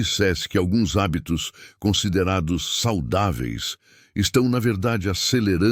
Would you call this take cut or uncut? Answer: uncut